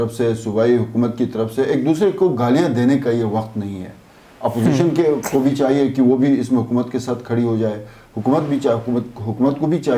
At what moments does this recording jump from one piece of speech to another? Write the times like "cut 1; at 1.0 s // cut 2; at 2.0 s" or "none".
none